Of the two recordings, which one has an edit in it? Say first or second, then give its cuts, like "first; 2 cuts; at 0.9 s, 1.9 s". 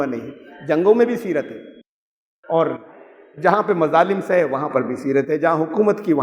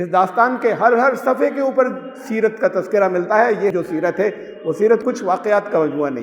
second; 2 cuts; at 3.7 s, 5.0 s